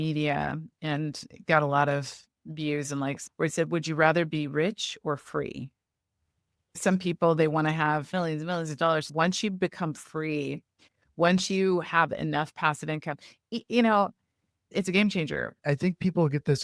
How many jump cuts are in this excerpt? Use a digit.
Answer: 2